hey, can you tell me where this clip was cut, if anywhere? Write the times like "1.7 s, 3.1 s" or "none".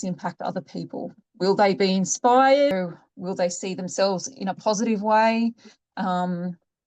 2.7 s